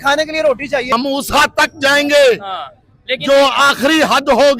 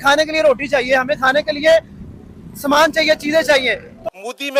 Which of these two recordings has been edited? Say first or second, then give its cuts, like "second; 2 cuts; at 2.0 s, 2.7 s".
first; 1 cut; at 0.9 s